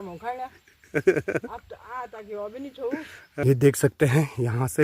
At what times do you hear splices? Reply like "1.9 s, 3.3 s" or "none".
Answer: 3.4 s

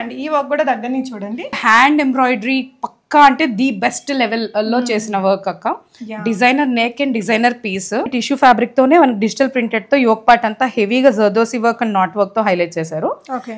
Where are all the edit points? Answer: 1.6 s, 8.2 s

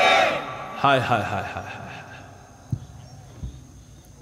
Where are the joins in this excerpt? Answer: none

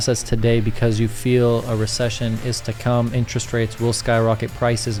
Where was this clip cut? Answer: none

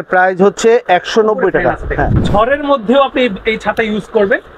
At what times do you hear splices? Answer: 2.2 s

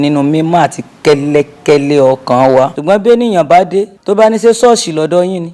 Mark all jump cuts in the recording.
2.7 s, 4.0 s

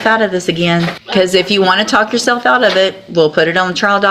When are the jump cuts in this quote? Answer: 1.0 s

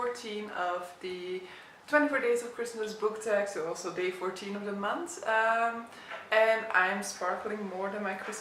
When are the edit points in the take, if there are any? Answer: none

